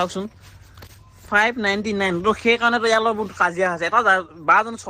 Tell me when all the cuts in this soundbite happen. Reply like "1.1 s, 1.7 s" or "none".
none